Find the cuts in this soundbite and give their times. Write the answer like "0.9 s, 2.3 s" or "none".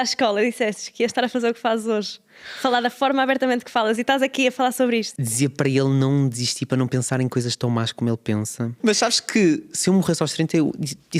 5.2 s, 8.8 s